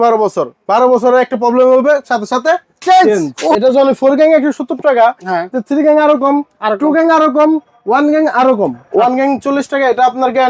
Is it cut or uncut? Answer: cut